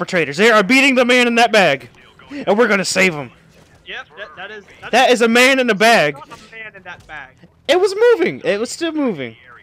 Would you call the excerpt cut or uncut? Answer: uncut